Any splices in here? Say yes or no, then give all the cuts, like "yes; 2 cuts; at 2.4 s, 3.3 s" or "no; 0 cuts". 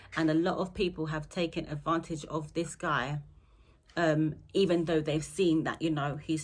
no; 0 cuts